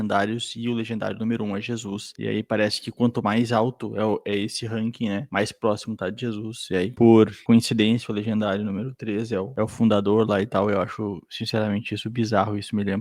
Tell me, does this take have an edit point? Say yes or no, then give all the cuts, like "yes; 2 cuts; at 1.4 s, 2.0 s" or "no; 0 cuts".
no; 0 cuts